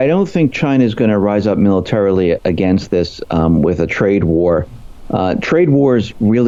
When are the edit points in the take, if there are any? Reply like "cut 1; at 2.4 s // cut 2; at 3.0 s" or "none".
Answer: none